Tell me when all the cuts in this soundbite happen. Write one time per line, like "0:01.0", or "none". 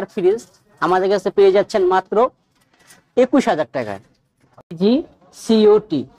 0:04.8